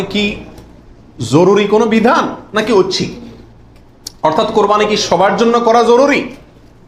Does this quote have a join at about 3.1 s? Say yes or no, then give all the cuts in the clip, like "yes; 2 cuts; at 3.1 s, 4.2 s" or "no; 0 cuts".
no; 0 cuts